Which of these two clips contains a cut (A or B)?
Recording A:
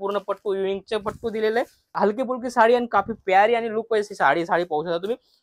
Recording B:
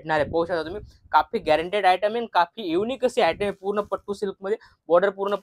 A